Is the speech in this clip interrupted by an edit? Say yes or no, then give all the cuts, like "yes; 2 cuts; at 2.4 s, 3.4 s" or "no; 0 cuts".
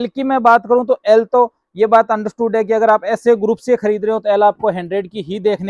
no; 0 cuts